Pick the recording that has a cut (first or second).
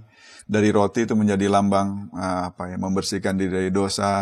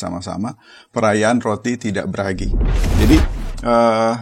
second